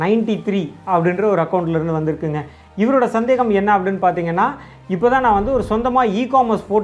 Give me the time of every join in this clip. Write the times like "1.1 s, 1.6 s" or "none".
none